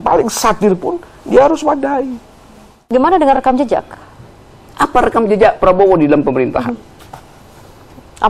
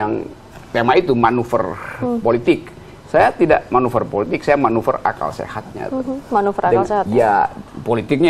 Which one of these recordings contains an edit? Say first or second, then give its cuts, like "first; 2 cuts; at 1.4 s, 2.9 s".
first; 1 cut; at 2.9 s